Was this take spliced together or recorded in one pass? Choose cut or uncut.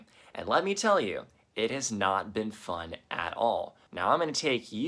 cut